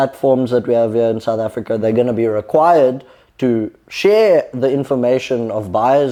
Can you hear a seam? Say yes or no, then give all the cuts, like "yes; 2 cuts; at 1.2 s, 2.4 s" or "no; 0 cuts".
no; 0 cuts